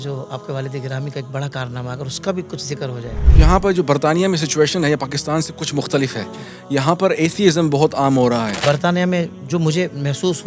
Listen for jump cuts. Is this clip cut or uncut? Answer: cut